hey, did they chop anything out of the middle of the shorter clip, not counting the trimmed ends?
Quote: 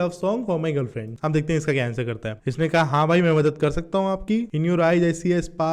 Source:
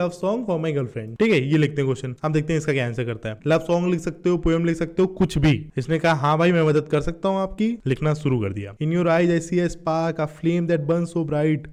yes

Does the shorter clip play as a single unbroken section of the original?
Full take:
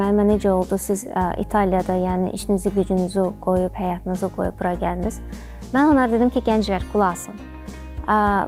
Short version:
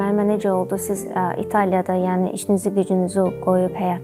yes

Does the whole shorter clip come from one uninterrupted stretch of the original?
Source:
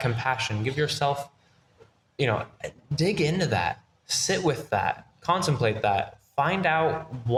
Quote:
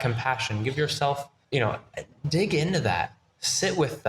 no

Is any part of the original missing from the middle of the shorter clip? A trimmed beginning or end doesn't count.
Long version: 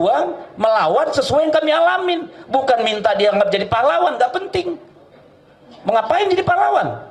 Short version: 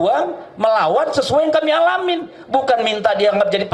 no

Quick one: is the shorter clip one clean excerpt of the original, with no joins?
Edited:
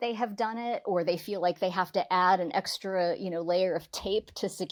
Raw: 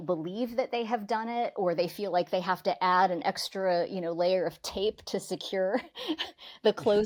yes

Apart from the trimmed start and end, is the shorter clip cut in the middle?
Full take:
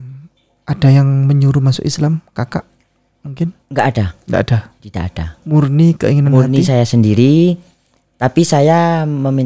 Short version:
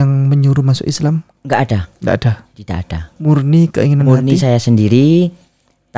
yes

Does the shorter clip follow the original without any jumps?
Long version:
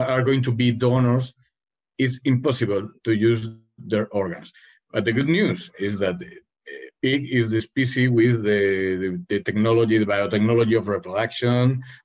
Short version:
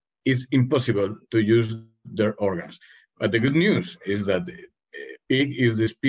yes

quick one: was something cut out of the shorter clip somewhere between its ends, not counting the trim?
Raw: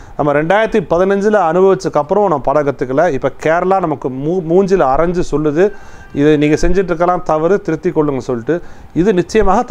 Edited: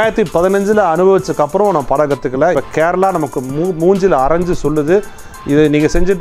yes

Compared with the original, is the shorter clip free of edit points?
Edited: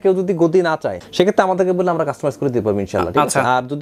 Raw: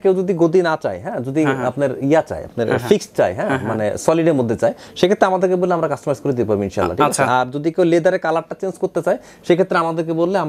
no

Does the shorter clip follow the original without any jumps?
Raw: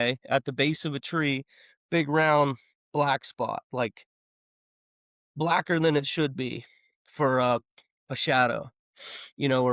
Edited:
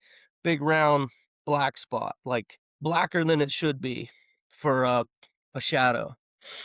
no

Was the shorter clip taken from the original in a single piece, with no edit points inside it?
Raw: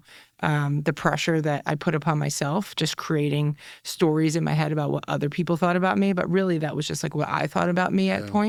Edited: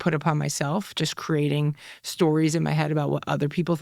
yes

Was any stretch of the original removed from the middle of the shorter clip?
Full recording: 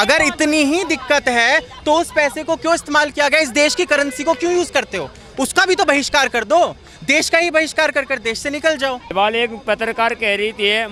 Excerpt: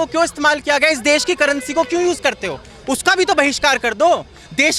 no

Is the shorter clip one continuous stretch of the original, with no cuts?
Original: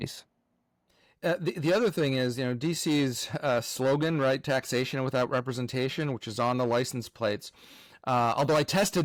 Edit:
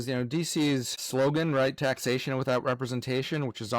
no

